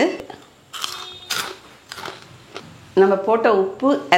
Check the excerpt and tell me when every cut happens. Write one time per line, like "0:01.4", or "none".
none